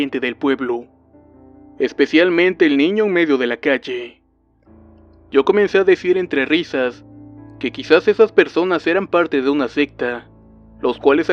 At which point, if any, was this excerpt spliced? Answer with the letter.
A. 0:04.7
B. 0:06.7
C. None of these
B